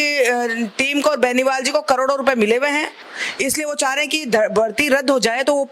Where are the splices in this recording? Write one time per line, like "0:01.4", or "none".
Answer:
none